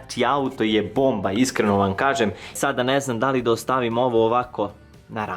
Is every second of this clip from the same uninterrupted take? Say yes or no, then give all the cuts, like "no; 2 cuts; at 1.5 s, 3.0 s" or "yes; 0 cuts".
no; 1 cut; at 2.5 s